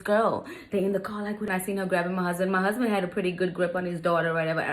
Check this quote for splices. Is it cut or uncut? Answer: cut